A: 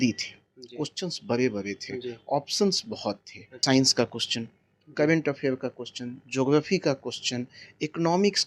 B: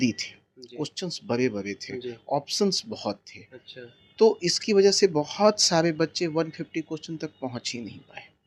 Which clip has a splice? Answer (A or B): A